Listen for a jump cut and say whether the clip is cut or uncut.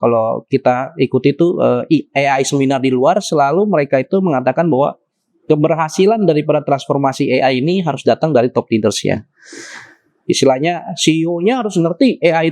uncut